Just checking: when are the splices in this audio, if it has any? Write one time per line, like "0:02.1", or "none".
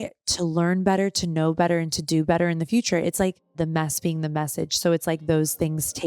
0:03.6